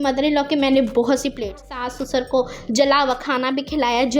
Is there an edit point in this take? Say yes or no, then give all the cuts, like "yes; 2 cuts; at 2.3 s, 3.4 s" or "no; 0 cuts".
yes; 1 cut; at 1.7 s